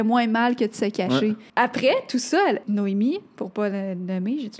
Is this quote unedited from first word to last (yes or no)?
no